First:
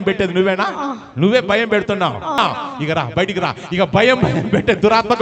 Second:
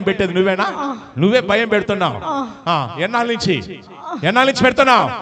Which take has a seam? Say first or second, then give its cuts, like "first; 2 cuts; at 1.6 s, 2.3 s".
first; 1 cut; at 2.4 s